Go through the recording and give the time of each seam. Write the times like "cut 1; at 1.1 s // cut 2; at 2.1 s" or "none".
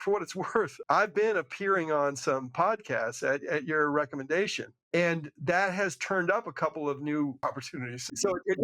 none